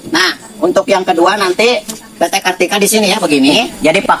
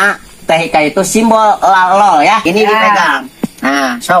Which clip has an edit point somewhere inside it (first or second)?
second